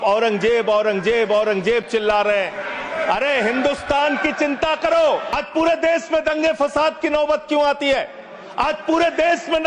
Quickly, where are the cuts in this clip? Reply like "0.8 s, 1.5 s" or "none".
5.3 s

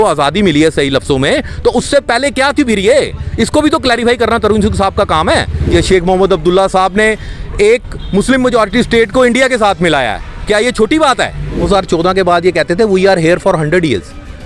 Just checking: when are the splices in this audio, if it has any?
5.7 s, 11.7 s

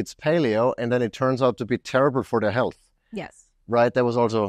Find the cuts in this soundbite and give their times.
none

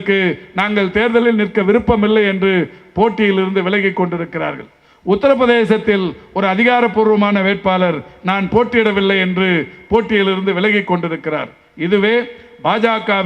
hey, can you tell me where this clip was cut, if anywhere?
none

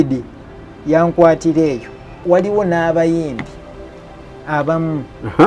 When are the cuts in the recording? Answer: 2.2 s

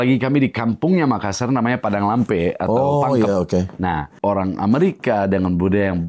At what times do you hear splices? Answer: 4.1 s

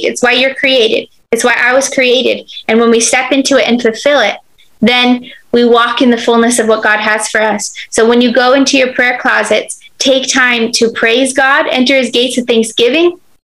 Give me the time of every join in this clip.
none

